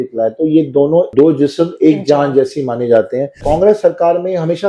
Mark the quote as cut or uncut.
cut